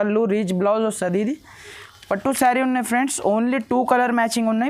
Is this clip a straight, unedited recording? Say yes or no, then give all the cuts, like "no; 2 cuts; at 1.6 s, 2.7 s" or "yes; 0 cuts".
yes; 0 cuts